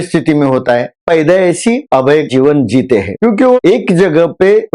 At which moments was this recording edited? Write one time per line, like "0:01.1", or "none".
0:01.0
0:02.2